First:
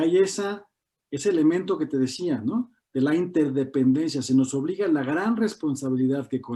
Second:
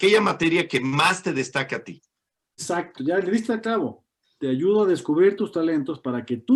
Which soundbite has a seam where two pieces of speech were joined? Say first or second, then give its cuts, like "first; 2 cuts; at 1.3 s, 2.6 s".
second; 1 cut; at 2.6 s